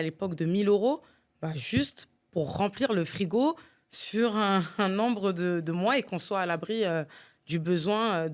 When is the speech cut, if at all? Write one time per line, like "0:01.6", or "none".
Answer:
none

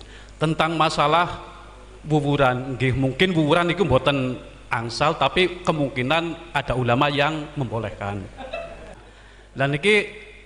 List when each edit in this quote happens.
0:08.9

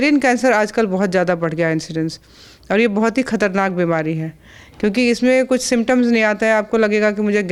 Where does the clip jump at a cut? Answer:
none

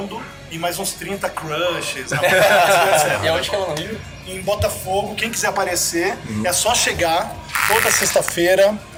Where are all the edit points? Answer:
none

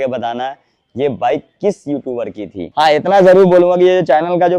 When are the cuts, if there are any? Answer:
0:02.6

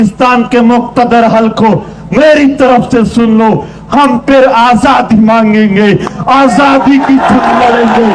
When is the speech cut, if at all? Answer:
none

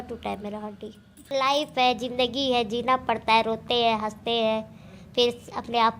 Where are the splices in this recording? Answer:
0:01.3

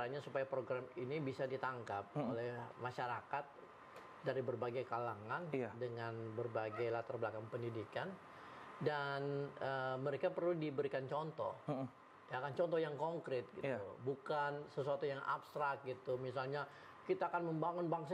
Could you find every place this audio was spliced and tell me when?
none

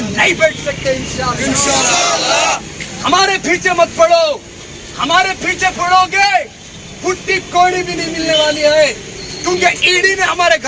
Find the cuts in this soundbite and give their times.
0:02.7

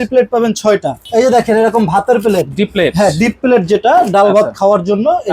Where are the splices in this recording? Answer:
0:01.0

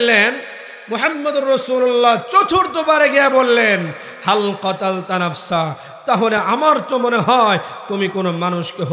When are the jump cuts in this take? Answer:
none

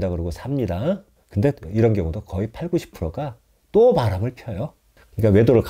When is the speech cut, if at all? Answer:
0:01.2

